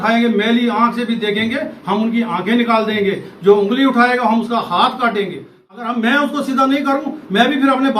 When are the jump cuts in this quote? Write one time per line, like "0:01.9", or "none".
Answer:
0:05.5